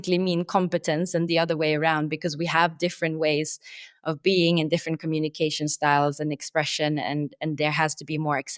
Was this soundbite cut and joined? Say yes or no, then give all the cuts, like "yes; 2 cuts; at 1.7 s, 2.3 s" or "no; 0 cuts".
no; 0 cuts